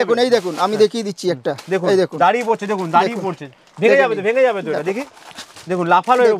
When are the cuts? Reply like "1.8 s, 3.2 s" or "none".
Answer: none